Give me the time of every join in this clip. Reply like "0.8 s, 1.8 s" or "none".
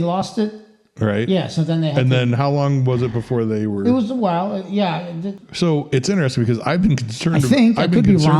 5.4 s